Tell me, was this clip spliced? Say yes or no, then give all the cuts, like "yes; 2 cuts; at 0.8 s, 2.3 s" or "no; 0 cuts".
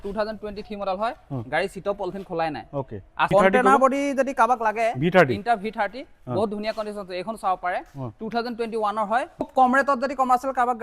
yes; 2 cuts; at 3.3 s, 9.5 s